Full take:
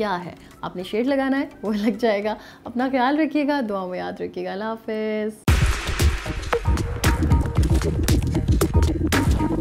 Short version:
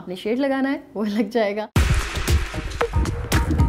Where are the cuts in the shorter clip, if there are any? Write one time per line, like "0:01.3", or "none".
0:01.7